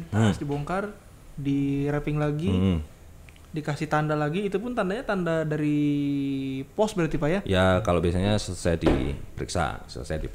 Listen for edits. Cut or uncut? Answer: uncut